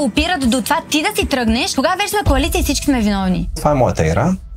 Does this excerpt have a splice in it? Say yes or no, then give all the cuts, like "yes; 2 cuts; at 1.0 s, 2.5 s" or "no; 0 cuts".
yes; 2 cuts; at 1.7 s, 3.6 s